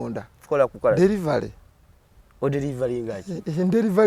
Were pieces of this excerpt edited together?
no; 0 cuts

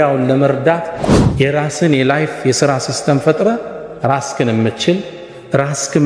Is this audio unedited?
no; 1 cut; at 1.0 s

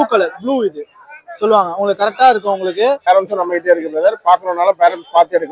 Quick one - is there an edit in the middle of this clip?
yes; 1 cut; at 3.1 s

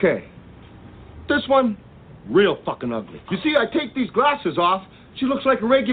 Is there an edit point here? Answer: yes; 1 cut; at 3.2 s

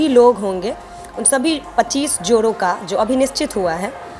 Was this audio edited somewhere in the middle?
no; 0 cuts

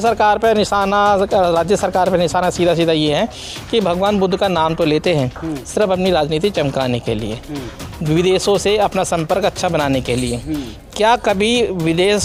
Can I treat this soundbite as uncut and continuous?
yes; 0 cuts

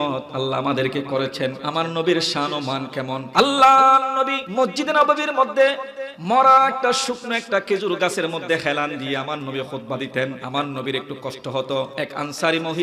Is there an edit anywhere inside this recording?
yes; 5 cuts; at 1.6 s, 3.2 s, 4.4 s, 10.4 s, 11.9 s

